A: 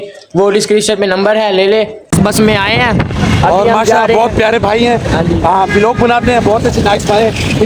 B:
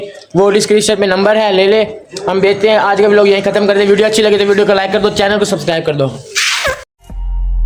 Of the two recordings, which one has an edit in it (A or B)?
A